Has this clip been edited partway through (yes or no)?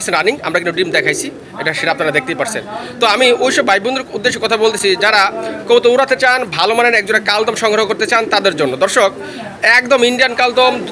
no